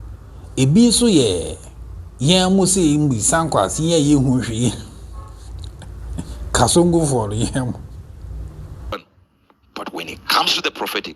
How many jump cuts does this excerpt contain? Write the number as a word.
one